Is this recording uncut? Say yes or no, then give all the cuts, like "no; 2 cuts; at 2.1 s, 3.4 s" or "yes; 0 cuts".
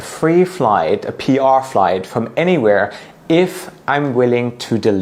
yes; 0 cuts